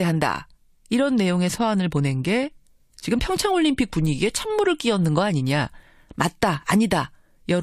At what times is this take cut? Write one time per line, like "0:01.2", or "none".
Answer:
0:06.1